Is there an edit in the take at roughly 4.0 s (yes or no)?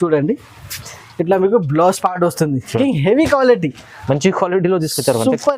no